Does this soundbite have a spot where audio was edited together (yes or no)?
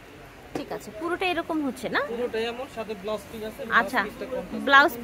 no